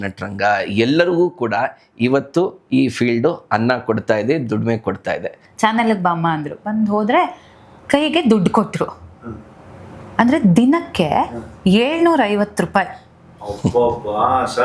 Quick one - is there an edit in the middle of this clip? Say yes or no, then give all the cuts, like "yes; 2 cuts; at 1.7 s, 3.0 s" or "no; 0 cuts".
yes; 1 cut; at 5.4 s